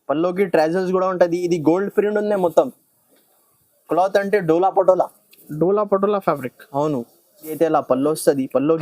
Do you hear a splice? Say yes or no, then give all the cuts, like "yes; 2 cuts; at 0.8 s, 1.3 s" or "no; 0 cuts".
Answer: yes; 1 cut; at 7.5 s